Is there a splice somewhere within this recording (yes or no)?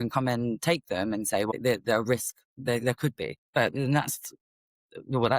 yes